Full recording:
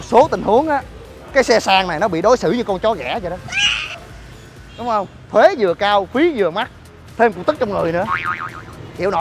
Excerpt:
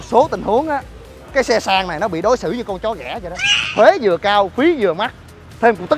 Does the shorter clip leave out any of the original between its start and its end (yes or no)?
yes